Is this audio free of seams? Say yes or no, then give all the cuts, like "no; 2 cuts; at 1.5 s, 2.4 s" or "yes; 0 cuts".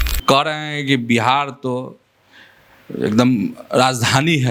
yes; 0 cuts